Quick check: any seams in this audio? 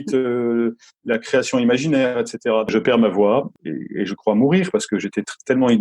yes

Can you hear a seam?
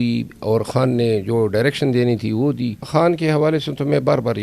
yes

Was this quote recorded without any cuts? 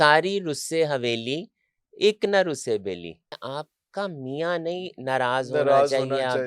no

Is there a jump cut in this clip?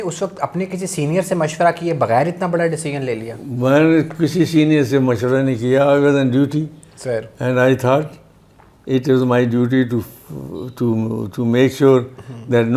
no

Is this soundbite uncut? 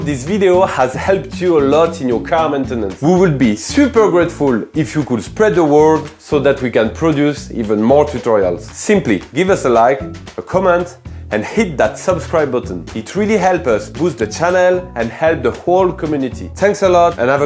yes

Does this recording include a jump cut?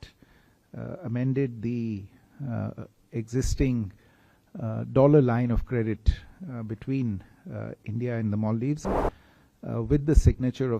yes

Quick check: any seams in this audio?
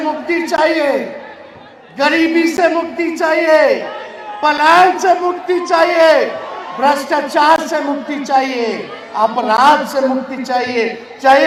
no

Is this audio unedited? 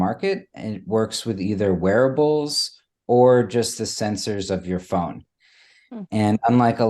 yes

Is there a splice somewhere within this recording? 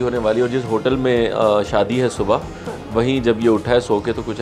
no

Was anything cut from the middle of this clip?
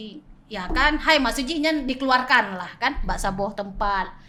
no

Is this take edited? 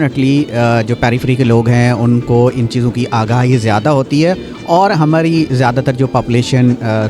yes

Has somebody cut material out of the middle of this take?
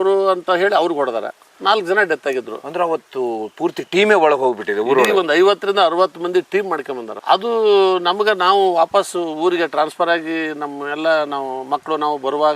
no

